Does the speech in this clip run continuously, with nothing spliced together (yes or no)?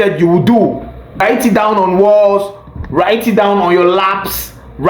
no